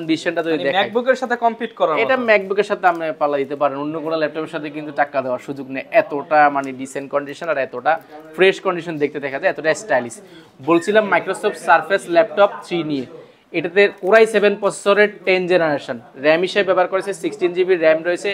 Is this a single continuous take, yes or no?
yes